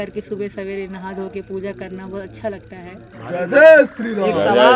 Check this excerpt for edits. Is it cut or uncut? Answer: cut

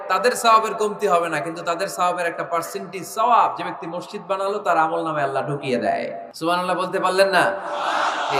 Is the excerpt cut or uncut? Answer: cut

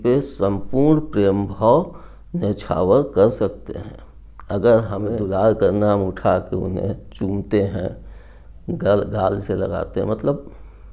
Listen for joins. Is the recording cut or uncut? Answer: cut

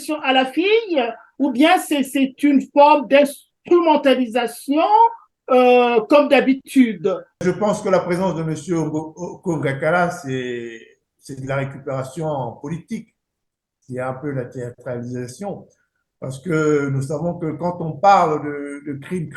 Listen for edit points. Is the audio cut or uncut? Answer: cut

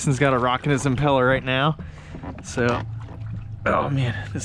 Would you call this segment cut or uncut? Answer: uncut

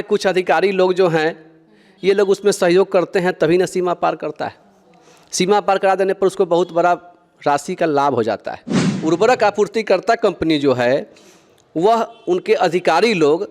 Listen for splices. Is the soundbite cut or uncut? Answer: cut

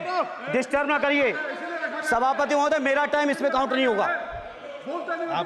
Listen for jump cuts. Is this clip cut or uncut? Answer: uncut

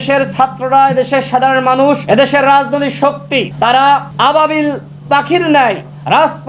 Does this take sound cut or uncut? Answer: cut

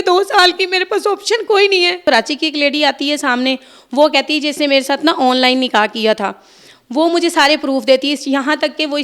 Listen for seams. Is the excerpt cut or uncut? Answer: cut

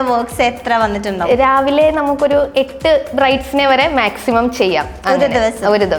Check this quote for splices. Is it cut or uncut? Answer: uncut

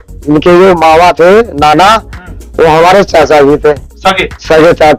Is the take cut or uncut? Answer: uncut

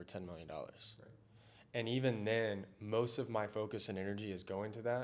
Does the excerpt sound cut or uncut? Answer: uncut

